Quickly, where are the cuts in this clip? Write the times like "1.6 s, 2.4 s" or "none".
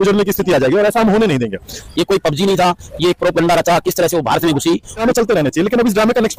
1.8 s, 5.0 s

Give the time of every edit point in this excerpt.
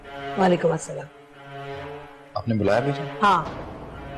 none

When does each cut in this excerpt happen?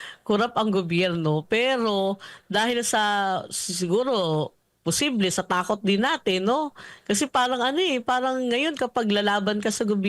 none

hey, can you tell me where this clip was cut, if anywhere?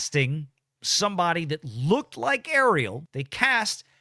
3.0 s

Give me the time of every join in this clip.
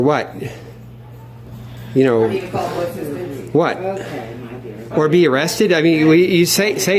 none

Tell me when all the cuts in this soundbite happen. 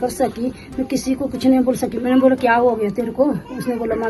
2.0 s

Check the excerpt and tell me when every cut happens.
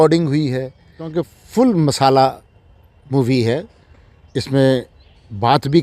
1.1 s

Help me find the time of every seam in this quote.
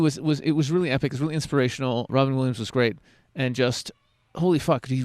2.1 s

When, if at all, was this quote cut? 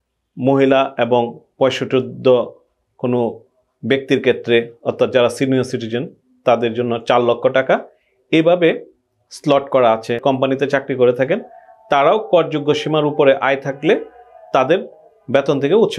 10.2 s

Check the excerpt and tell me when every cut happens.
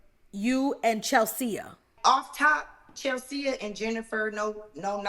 1.9 s

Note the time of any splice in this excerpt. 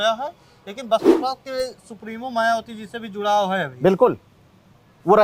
none

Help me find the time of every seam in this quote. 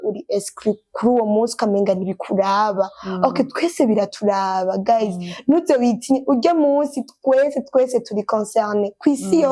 none

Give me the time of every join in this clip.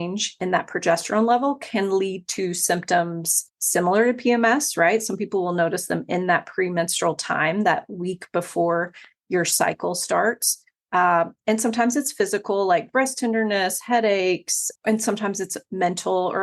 3.5 s, 14.7 s

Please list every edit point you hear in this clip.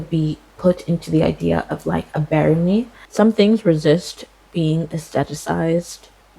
3.0 s

